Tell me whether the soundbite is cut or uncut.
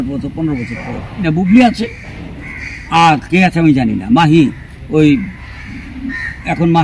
cut